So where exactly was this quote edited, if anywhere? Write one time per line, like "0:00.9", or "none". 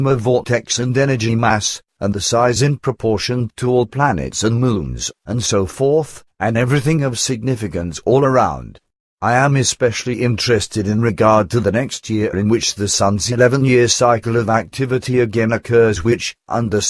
0:03.6